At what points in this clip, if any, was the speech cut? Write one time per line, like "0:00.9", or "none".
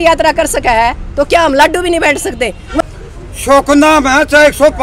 0:02.8